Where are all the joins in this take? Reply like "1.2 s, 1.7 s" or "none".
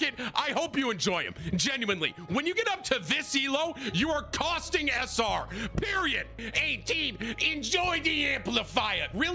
6.4 s